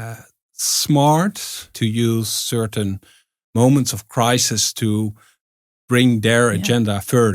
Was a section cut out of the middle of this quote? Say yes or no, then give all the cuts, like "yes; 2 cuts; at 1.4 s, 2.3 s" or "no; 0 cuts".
yes; 1 cut; at 1.7 s